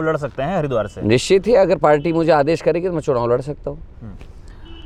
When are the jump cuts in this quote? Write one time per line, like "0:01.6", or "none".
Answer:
none